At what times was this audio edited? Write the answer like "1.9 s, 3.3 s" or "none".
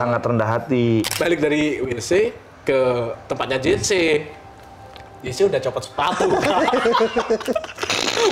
1.1 s